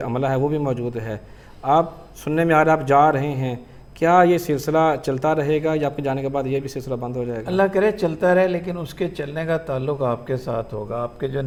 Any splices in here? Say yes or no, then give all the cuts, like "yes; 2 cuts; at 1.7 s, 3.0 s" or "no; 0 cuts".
no; 0 cuts